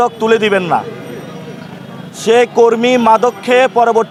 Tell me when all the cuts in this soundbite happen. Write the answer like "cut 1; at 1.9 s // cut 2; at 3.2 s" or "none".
none